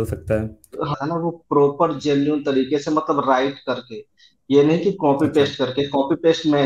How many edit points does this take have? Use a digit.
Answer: 1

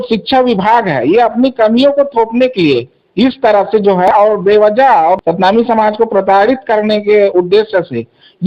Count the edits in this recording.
2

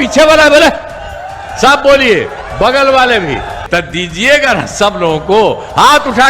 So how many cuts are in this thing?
1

